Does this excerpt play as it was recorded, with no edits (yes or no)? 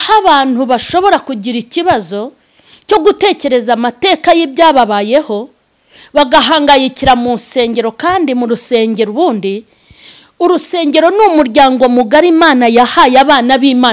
yes